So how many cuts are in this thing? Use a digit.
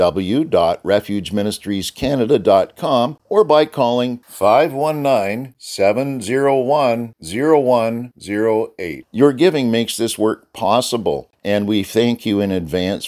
2